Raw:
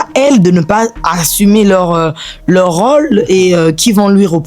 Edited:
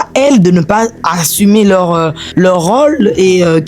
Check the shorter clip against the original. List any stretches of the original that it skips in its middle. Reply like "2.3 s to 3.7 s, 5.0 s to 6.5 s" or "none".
2.2 s to 2.3 s